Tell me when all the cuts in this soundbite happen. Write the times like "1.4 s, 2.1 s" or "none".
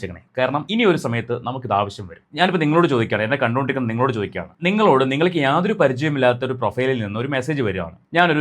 2.2 s